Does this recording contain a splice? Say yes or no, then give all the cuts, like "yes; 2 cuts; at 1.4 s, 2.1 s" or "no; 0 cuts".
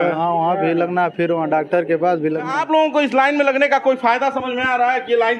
yes; 1 cut; at 2.6 s